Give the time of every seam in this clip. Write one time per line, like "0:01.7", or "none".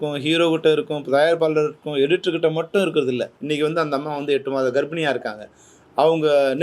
0:03.3